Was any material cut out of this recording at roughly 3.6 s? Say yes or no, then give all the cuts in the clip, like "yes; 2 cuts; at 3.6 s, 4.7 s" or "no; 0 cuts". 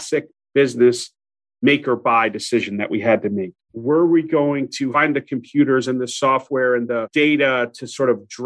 yes; 2 cuts; at 3.6 s, 4.9 s